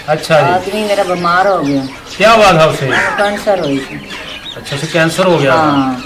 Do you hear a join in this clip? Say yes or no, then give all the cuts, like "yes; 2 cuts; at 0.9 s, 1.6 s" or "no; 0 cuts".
no; 0 cuts